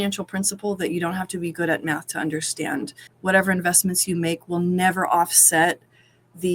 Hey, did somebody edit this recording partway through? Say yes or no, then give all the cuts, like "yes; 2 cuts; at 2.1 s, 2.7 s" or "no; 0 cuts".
yes; 1 cut; at 3.0 s